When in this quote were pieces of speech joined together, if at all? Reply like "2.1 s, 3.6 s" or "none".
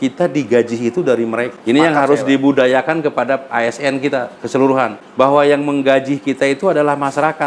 1.5 s, 5.0 s